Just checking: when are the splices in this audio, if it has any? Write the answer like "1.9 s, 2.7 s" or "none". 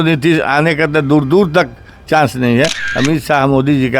2.8 s